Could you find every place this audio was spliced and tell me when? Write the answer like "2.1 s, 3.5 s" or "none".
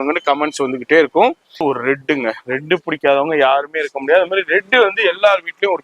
1.6 s